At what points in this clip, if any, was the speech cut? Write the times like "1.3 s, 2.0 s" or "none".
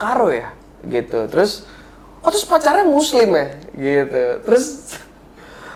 none